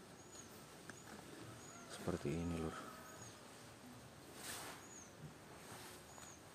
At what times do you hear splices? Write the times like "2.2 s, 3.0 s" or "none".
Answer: 3.6 s